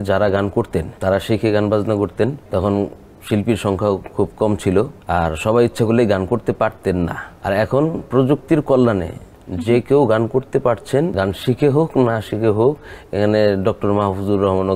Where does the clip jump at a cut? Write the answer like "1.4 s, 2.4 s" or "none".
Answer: 0.9 s, 2.4 s, 5.0 s, 7.3 s, 11.1 s